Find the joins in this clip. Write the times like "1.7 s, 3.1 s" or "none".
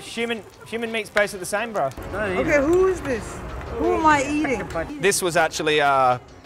2.0 s, 4.9 s